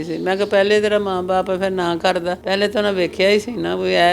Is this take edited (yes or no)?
yes